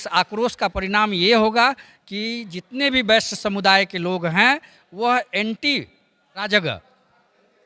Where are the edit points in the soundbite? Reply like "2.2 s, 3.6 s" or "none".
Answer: 6.2 s